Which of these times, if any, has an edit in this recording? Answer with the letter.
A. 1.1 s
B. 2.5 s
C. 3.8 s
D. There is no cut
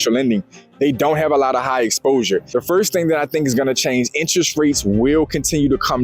B